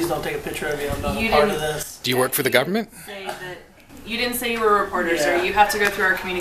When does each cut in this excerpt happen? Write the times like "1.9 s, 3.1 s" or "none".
none